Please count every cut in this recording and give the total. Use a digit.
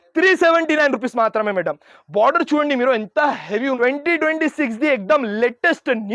1